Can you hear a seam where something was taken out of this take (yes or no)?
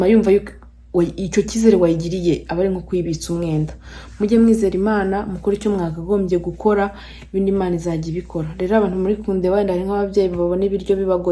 no